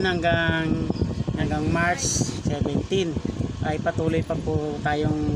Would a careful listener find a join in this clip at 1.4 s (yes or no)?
yes